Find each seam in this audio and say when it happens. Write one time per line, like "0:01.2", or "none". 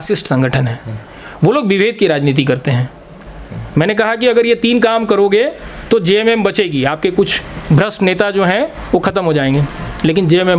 0:03.2